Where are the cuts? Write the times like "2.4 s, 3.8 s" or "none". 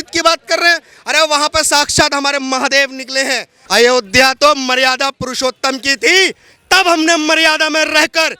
3.5 s